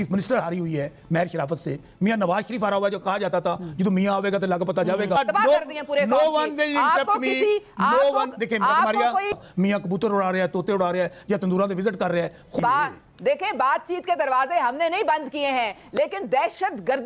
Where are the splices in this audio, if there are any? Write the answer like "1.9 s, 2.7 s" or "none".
5.2 s, 9.4 s, 12.5 s